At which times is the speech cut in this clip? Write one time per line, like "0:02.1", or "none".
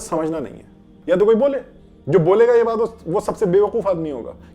0:00.9